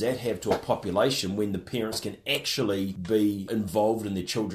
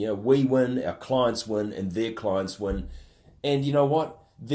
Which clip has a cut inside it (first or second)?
first